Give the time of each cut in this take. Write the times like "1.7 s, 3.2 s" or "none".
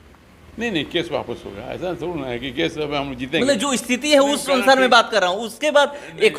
none